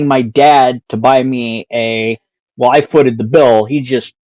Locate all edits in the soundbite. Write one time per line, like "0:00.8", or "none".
none